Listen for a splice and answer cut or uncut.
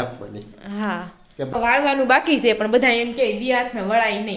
cut